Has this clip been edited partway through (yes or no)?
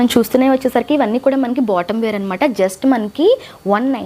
no